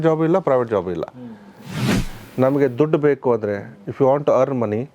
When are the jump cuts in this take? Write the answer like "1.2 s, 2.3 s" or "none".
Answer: 1.9 s